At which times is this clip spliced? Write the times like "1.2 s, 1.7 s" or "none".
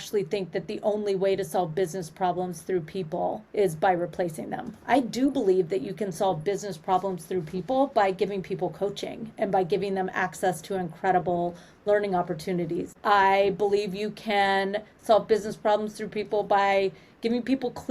3.4 s, 12.9 s